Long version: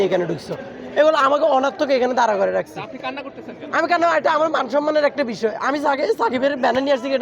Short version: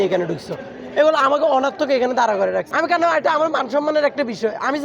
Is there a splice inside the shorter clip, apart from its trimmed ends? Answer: yes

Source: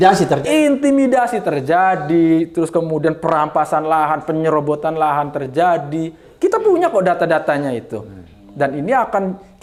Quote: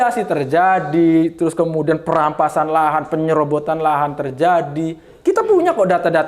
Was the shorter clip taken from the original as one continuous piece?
yes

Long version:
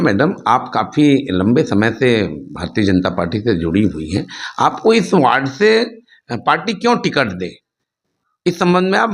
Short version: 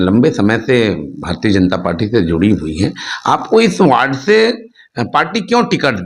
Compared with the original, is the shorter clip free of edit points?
yes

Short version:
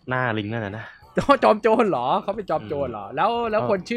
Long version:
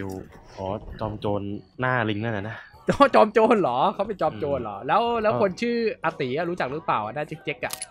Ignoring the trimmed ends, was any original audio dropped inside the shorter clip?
no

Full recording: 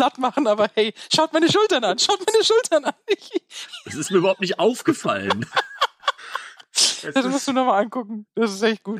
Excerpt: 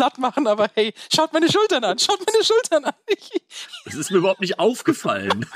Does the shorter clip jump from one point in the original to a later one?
no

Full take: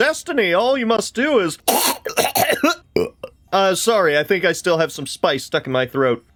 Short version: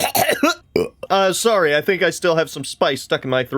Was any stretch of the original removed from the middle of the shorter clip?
yes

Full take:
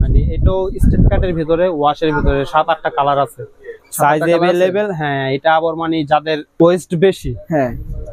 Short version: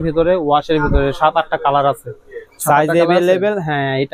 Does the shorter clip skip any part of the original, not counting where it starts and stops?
no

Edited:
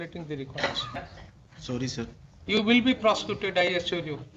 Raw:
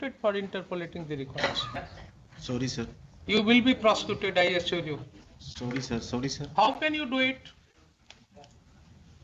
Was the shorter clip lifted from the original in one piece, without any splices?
yes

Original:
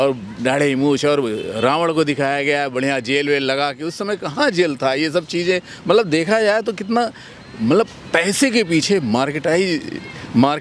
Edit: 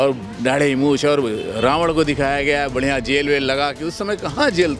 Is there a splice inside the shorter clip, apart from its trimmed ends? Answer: no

